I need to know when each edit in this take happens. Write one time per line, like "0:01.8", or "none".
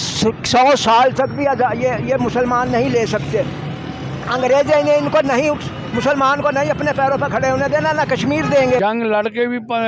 0:08.8